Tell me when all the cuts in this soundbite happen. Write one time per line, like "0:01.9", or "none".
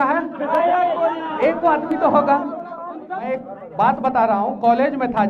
0:03.2